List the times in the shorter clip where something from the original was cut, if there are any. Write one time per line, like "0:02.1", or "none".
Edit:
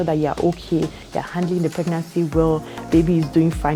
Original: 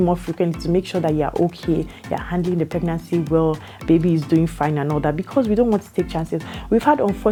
none